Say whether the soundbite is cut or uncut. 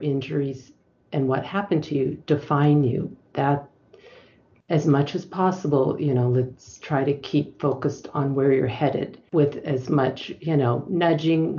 cut